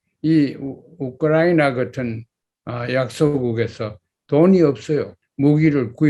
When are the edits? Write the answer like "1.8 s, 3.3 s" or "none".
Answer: 5.2 s